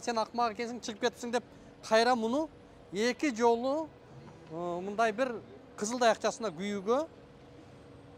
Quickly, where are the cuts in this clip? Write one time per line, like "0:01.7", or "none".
none